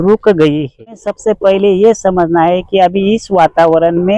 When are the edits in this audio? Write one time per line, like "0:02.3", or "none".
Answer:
0:01.1